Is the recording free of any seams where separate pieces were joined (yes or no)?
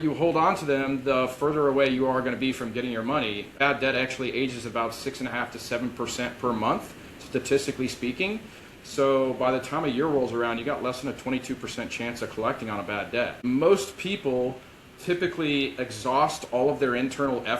yes